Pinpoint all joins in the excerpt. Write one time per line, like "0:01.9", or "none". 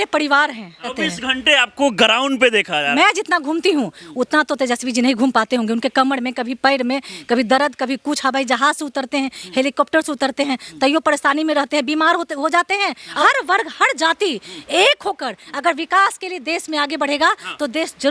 0:01.0
0:02.9
0:13.2